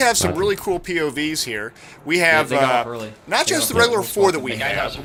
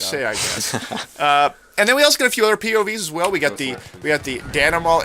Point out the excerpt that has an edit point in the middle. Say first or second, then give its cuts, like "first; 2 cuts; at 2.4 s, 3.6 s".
second; 1 cut; at 3.0 s